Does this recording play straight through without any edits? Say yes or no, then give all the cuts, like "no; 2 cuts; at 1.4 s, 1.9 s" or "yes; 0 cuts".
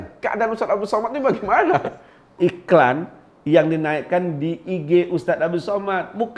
no; 1 cut; at 2.3 s